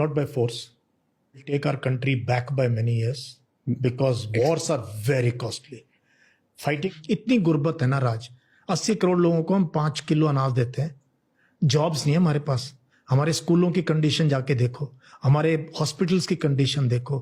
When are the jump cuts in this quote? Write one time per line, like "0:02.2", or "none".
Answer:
0:01.5
0:06.8

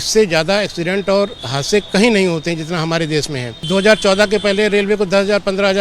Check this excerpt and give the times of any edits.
0:03.7

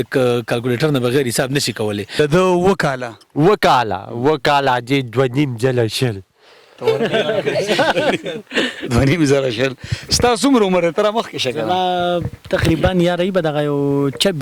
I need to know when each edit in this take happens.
0:02.1

